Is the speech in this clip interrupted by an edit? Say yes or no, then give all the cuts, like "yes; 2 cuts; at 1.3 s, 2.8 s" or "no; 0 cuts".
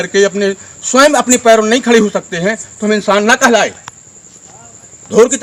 no; 0 cuts